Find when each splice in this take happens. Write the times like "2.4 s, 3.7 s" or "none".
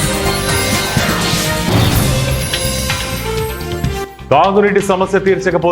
none